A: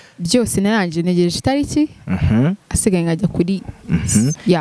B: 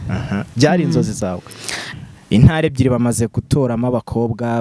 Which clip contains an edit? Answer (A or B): B